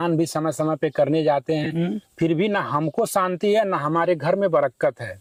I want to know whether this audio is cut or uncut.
uncut